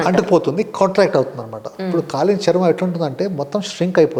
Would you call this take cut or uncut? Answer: uncut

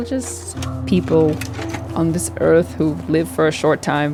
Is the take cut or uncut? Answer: uncut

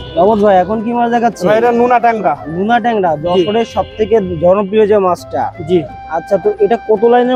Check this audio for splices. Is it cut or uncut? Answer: uncut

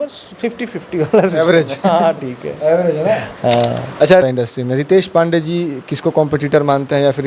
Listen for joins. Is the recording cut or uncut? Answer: cut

